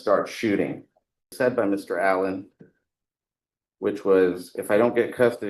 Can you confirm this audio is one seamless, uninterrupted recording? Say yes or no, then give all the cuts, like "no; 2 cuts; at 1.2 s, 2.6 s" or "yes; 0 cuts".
no; 1 cut; at 1.3 s